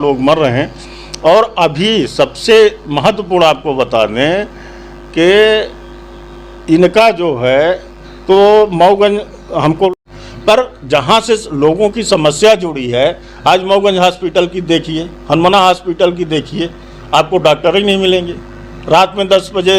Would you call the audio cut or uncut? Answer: cut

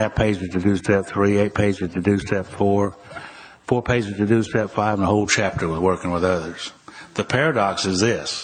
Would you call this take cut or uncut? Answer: uncut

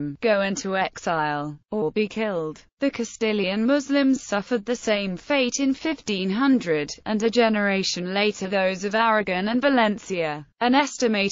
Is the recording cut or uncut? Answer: cut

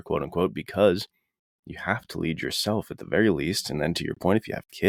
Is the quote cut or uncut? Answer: uncut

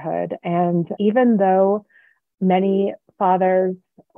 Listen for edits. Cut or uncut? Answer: uncut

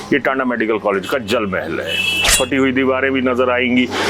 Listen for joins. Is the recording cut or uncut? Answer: cut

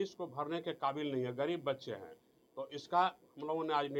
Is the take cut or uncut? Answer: uncut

